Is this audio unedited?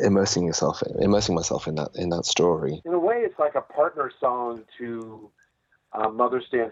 no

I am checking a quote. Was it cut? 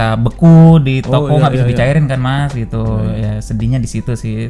no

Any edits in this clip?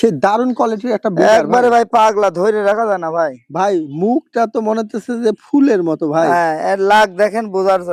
no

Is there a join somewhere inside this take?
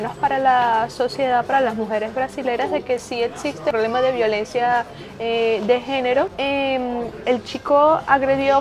yes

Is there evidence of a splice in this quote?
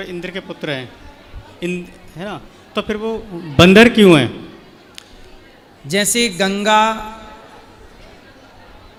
no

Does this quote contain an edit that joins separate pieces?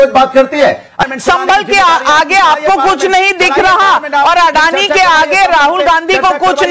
yes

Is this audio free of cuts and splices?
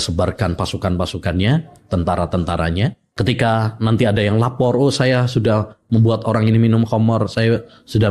no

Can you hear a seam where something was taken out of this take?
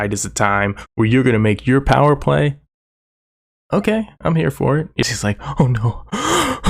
yes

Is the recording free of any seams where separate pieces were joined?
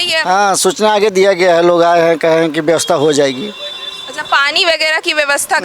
yes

